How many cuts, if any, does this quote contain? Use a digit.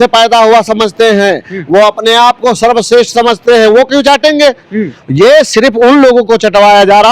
0